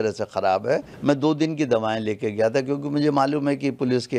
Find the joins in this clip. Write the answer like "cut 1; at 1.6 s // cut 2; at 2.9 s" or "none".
cut 1; at 0.9 s